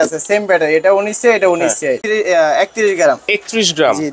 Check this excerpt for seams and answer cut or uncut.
cut